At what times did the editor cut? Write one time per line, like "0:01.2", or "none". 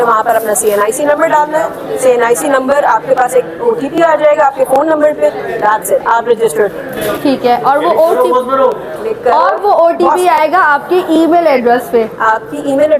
none